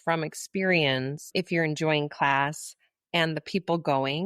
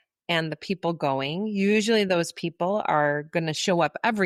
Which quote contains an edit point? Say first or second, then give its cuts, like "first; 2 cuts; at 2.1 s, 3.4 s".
first; 1 cut; at 1.3 s